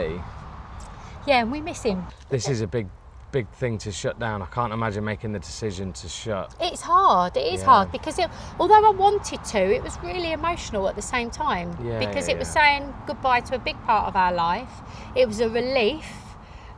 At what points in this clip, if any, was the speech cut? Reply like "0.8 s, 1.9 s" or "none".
2.1 s